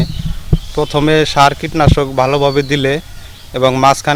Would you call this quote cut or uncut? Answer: uncut